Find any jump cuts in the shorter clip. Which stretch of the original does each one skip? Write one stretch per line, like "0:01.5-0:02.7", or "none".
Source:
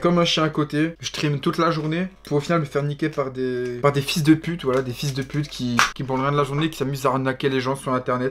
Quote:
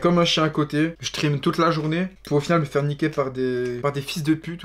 none

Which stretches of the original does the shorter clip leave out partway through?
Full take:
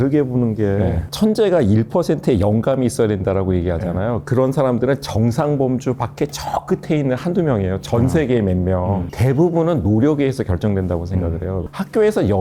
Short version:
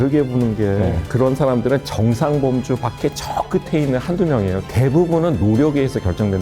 0:01.1-0:04.2
0:07.8-0:09.1

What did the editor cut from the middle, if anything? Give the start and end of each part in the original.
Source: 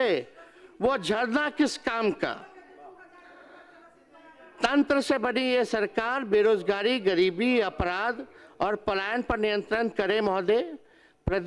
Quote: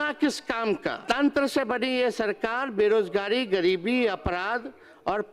0:02.4-0:04.5

